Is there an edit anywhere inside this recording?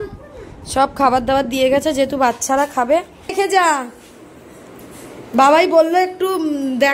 yes; 1 cut; at 3.3 s

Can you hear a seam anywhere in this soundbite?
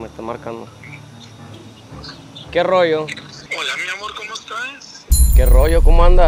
no; 0 cuts

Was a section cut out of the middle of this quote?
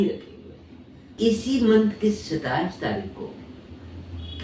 yes; 1 cut; at 1.1 s

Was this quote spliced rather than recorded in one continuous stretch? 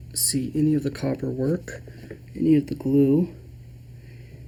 no; 0 cuts

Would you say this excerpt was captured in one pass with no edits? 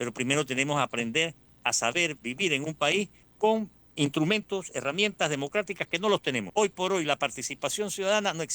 no; 3 cuts; at 1.5 s, 3.4 s, 6.5 s

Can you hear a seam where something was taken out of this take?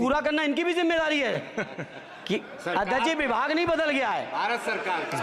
no; 0 cuts

